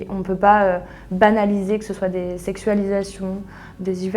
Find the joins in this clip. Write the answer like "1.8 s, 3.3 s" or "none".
none